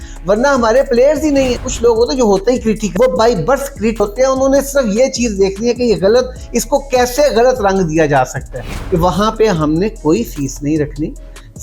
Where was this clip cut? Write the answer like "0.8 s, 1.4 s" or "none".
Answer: 1.7 s, 8.7 s